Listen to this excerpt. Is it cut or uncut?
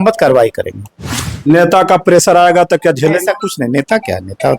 cut